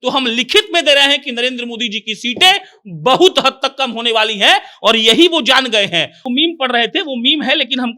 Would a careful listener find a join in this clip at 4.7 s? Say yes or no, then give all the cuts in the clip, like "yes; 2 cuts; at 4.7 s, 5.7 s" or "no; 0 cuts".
no; 1 cut; at 6.2 s